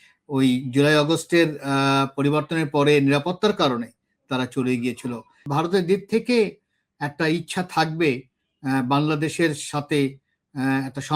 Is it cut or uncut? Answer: cut